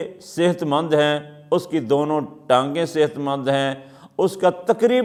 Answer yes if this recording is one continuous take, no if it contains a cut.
yes